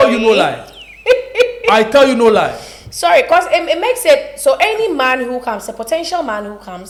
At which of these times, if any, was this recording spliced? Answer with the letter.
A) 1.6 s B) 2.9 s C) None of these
C